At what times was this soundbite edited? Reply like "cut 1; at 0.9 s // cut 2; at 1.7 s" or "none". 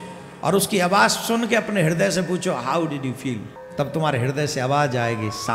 cut 1; at 3.6 s

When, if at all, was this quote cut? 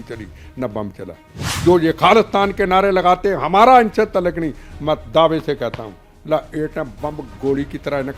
cut 1; at 1.5 s

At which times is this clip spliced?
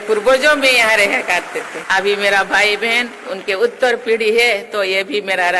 cut 1; at 1.8 s

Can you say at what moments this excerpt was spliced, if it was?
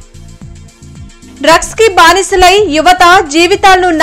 cut 1; at 0.9 s

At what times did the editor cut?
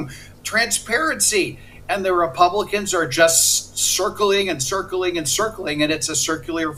none

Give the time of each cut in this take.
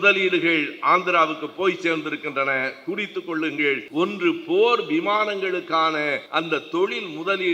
cut 1; at 3.8 s // cut 2; at 6.2 s

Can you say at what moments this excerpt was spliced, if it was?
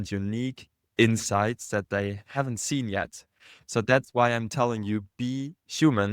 cut 1; at 2.3 s

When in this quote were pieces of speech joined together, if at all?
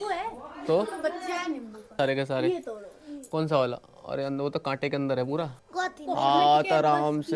cut 1; at 1.9 s // cut 2; at 5.6 s

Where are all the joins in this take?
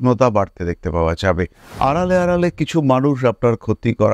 cut 1; at 1.6 s

